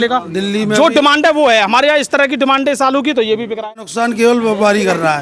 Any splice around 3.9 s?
yes; 1 cut; at 3.9 s

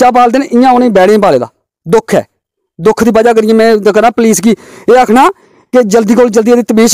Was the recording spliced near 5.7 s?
no; 0 cuts

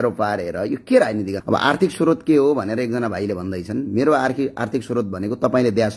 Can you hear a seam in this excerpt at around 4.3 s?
no; 1 cut; at 1.4 s

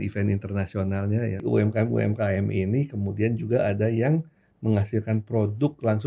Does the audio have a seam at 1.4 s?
yes; 1 cut; at 1.4 s

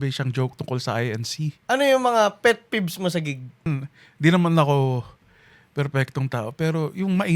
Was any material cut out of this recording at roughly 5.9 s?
no; 2 cuts; at 1.6 s, 3.7 s

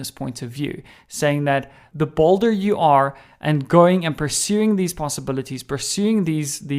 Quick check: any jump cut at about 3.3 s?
no; 1 cut; at 1.8 s

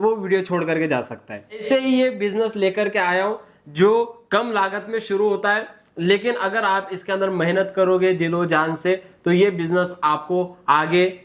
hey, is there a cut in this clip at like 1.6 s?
yes; 1 cut; at 1.6 s

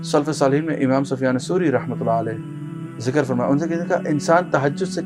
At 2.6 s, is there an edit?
no; 0 cuts

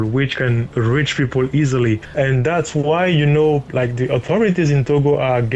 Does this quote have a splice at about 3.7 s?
yes; 2 cuts; at 2.1 s, 3.7 s

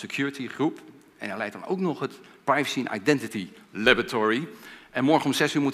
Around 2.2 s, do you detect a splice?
yes; 1 cut; at 2.2 s

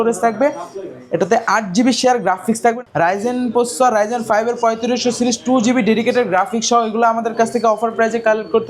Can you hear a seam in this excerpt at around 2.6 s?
yes; 1 cut; at 2.6 s

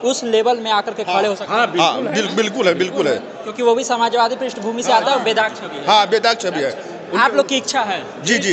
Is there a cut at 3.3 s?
no; 0 cuts

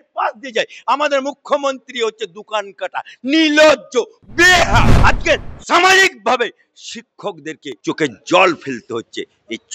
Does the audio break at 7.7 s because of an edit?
yes; 2 cuts; at 4.9 s, 7.7 s

